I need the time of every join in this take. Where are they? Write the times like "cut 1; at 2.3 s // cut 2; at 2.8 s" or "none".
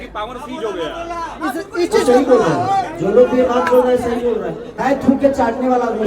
cut 1; at 4.7 s